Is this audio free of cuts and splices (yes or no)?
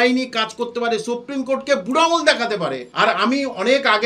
no